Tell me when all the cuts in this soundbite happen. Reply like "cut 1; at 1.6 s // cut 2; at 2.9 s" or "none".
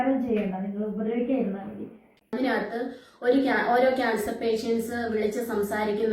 cut 1; at 2.1 s